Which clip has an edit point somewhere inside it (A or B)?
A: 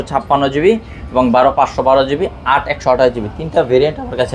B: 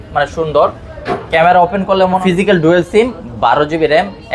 B